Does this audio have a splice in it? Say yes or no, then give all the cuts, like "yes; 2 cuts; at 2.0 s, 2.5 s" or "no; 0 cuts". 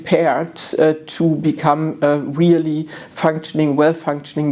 no; 0 cuts